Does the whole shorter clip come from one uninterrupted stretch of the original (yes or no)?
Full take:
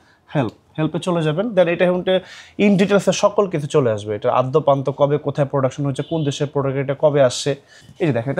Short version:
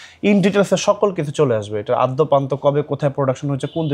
yes